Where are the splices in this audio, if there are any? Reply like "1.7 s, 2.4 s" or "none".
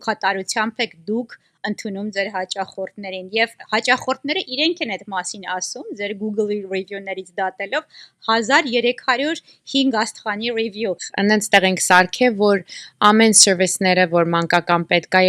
11.1 s